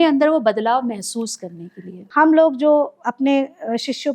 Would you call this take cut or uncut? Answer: cut